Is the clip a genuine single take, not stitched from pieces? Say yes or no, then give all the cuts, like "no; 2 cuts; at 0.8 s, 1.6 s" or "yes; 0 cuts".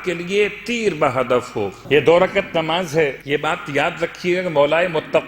no; 2 cuts; at 1.8 s, 3.2 s